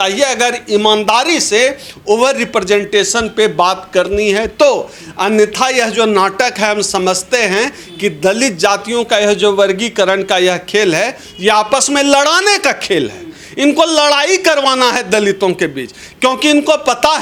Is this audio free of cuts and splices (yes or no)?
yes